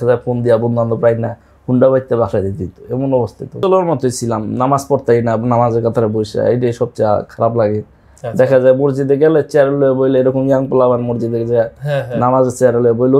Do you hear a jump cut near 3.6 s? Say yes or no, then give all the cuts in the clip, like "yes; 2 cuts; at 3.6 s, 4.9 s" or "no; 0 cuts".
yes; 1 cut; at 3.6 s